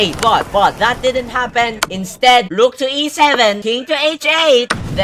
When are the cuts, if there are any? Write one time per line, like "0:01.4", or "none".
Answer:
none